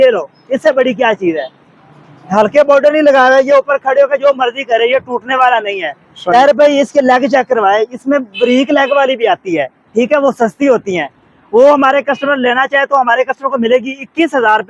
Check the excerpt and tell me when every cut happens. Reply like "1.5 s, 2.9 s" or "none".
none